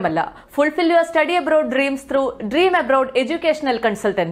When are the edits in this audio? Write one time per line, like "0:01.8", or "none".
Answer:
none